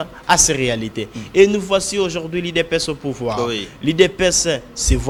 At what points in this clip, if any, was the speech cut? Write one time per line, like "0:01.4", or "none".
none

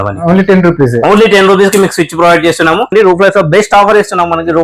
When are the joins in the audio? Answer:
0:02.9

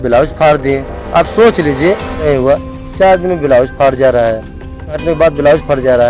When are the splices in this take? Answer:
0:02.2
0:05.0

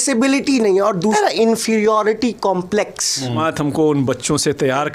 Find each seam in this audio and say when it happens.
0:01.1
0:03.4

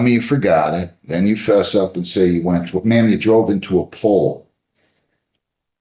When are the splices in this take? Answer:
none

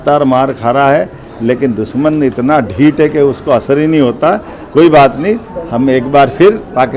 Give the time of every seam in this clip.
none

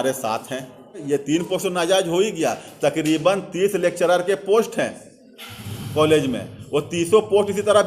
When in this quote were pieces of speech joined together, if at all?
0:01.0

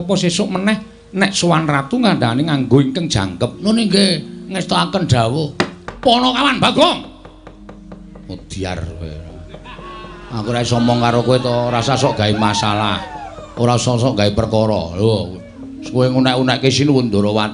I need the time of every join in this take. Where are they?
0:05.8

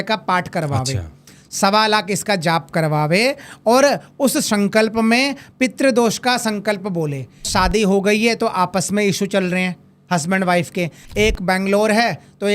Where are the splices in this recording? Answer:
0:07.5
0:11.0

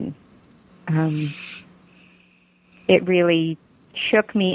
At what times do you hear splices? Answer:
none

